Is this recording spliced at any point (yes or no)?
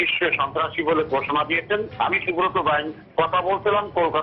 no